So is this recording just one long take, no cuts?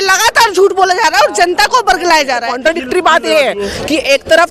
no; 1 cut; at 2.5 s

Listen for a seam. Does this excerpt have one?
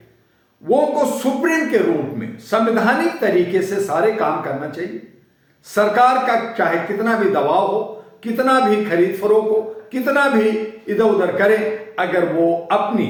no; 0 cuts

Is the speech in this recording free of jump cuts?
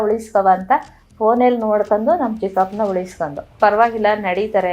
no; 1 cut; at 3.5 s

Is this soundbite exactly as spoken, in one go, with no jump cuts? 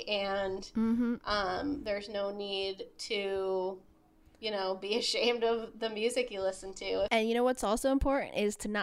no; 1 cut; at 7.1 s

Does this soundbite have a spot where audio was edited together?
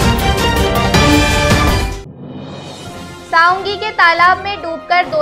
yes; 1 cut; at 3.1 s

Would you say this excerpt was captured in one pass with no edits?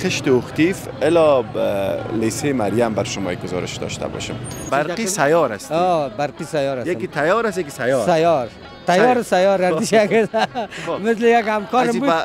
no; 1 cut; at 4.7 s

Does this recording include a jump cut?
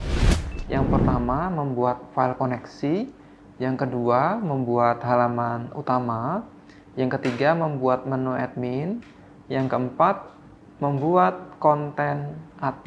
yes; 1 cut; at 1.1 s

